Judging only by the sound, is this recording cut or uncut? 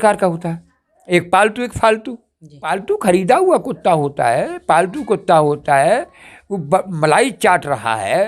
cut